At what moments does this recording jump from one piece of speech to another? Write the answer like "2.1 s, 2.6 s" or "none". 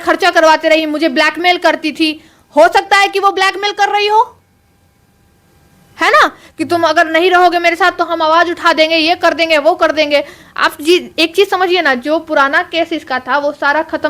none